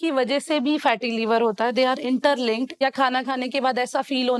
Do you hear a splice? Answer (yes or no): yes